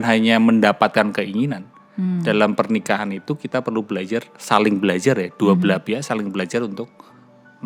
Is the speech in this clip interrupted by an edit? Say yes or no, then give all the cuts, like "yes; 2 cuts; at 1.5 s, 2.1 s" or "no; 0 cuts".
no; 0 cuts